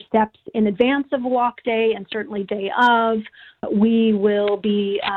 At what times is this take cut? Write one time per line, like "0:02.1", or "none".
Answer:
0:03.7